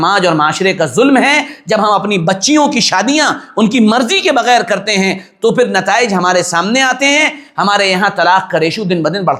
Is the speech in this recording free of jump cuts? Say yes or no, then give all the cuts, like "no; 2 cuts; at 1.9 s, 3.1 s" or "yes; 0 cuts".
yes; 0 cuts